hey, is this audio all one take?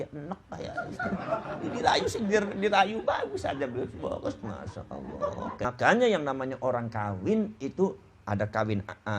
no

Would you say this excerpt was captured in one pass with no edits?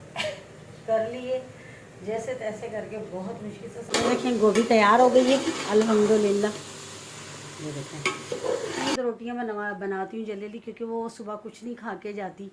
no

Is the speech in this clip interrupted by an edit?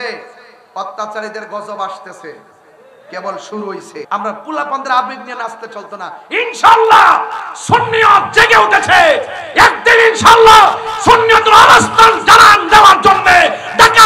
yes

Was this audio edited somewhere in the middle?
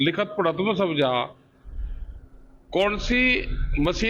yes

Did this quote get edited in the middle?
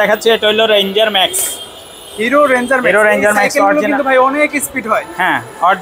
no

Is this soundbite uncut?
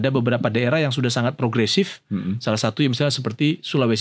yes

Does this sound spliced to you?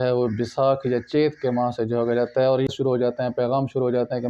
yes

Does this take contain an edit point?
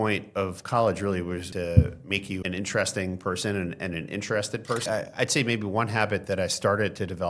yes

